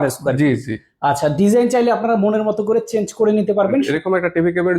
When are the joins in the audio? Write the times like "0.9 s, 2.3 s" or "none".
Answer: 3.9 s